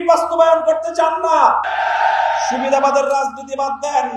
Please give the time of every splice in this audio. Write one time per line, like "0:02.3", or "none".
0:01.7